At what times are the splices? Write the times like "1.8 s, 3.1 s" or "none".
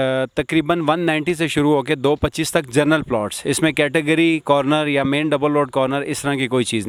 none